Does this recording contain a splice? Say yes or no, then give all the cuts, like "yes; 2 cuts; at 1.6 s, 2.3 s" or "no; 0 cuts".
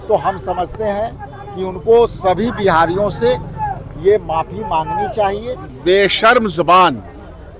yes; 1 cut; at 5.7 s